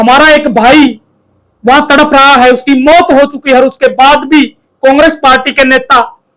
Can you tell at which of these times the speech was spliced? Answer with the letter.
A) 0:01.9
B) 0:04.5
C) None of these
C